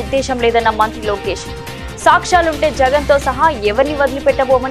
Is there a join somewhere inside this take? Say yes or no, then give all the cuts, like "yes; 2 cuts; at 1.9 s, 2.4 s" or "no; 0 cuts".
no; 0 cuts